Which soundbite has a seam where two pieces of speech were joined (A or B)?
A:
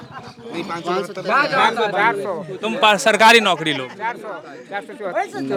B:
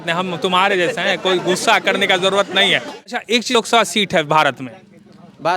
B